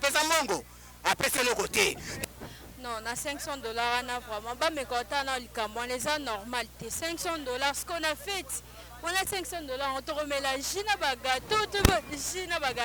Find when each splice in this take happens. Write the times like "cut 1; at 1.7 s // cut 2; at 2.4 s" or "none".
cut 1; at 2.2 s